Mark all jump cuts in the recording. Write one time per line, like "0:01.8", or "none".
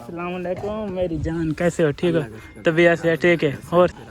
none